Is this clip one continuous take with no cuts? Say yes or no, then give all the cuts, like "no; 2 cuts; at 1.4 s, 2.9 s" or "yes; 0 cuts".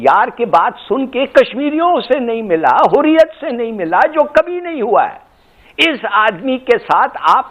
yes; 0 cuts